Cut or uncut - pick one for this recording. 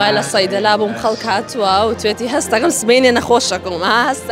uncut